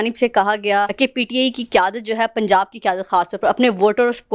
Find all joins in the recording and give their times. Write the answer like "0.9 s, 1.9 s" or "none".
0.9 s